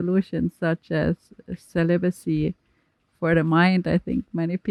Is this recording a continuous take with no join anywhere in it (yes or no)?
yes